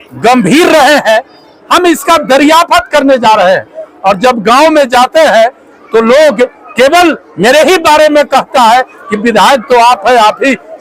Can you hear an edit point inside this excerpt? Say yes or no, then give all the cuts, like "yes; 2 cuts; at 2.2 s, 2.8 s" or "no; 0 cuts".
no; 0 cuts